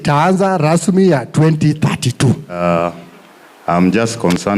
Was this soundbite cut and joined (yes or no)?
yes